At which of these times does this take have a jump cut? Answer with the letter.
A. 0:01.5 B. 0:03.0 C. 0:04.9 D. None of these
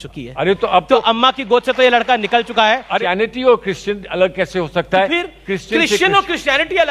B